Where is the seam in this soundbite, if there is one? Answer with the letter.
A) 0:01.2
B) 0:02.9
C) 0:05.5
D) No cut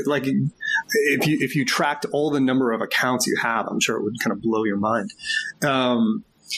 D